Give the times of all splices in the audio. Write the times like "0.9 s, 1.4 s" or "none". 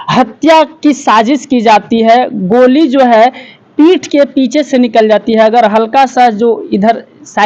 none